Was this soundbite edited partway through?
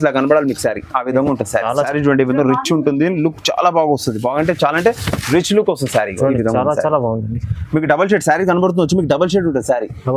yes; 1 cut; at 1.7 s

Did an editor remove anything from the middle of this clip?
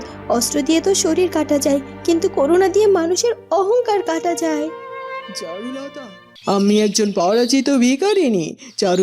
yes; 1 cut; at 6.4 s

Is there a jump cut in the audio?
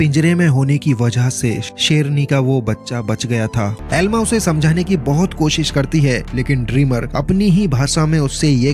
yes; 1 cut; at 3.8 s

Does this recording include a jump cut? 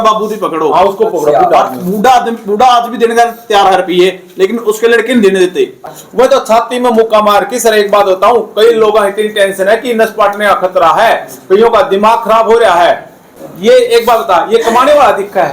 yes; 2 cuts; at 5.9 s, 13.2 s

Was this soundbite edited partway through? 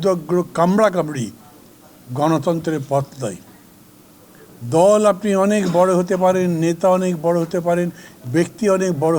no; 0 cuts

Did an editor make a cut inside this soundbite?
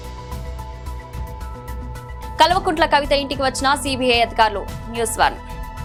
no; 0 cuts

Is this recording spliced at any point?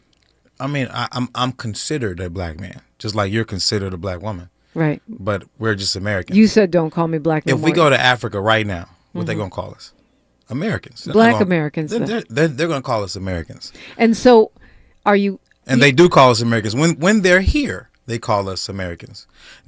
yes; 1 cut; at 10.9 s

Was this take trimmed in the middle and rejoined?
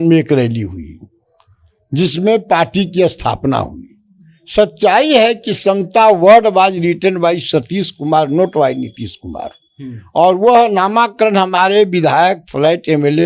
no; 0 cuts

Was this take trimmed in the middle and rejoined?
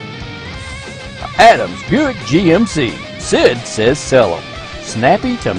no; 0 cuts

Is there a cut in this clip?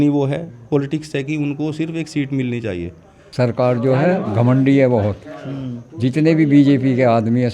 yes; 1 cut; at 3.3 s

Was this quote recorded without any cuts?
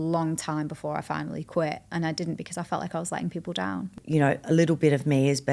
no; 1 cut; at 4.0 s

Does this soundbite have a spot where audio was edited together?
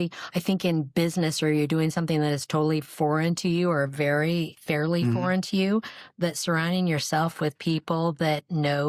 yes; 1 cut; at 4.5 s

